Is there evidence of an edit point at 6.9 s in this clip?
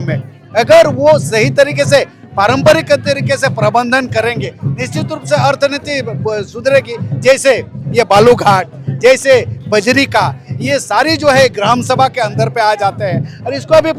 no; 0 cuts

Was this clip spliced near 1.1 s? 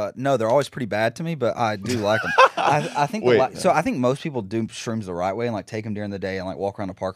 no; 1 cut; at 3.6 s

